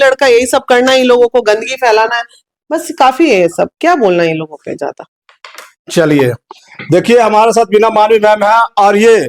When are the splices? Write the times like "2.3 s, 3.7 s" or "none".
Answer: none